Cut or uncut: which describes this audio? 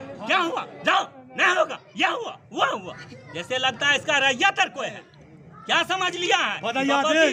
uncut